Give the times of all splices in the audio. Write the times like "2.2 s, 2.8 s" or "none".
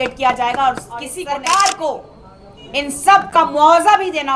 1.2 s